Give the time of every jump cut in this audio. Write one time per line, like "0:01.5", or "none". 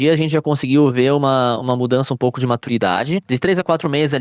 none